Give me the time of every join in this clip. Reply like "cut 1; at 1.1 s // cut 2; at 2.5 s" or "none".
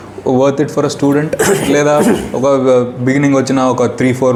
none